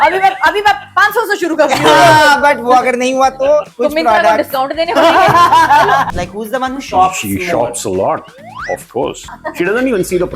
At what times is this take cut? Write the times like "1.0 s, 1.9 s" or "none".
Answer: 3.7 s, 6.1 s, 9.4 s